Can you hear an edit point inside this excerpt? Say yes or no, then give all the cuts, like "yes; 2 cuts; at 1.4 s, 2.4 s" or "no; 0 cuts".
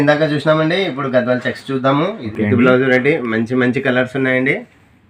yes; 1 cut; at 2.2 s